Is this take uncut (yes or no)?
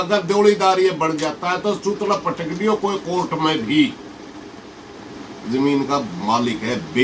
yes